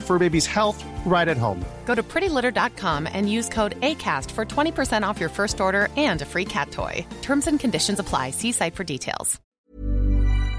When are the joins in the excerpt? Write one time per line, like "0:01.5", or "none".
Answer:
0:09.6